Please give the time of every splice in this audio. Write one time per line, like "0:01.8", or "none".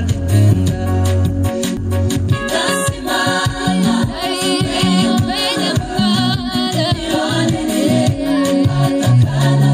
0:01.8